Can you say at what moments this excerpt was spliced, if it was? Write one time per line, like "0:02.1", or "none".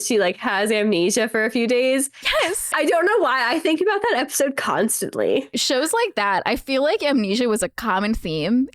0:02.7
0:05.5